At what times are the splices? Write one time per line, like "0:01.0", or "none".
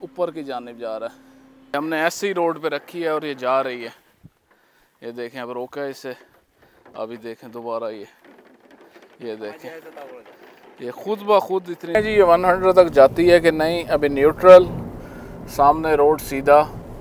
0:01.7
0:11.9